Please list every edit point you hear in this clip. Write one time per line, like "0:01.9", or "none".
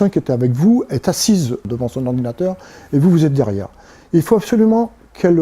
0:01.6